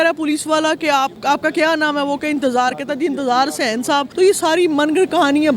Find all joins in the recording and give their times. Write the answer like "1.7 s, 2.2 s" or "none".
1.2 s, 4.1 s